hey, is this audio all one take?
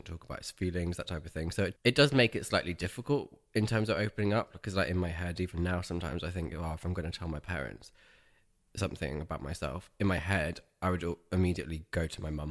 no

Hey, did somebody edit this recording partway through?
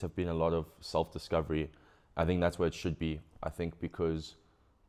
no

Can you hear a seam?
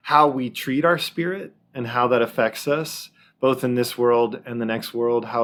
no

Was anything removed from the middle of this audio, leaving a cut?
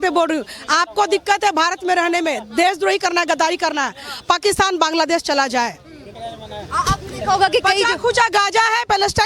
no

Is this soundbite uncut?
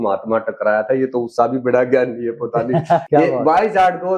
no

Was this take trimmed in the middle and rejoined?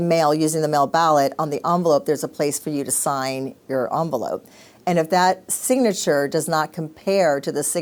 no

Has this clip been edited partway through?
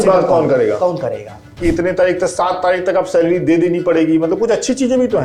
yes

